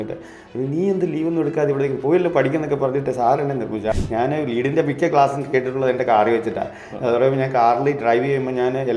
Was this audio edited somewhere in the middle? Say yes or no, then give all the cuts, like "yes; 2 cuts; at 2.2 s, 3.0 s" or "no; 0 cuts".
yes; 1 cut; at 3.9 s